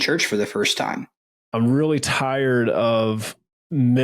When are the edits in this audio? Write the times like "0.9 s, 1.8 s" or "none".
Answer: 1.2 s